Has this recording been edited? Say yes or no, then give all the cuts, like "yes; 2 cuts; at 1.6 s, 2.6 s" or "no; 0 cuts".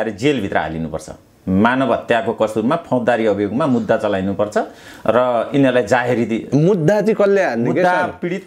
no; 0 cuts